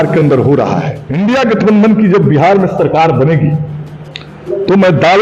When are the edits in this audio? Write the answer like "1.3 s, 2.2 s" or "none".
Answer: 1.0 s